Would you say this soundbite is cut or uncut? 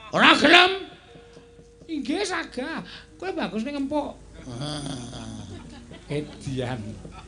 uncut